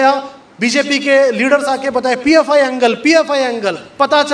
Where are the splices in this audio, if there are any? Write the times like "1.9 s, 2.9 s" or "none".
none